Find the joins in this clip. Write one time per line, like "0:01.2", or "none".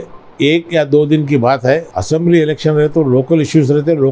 0:01.9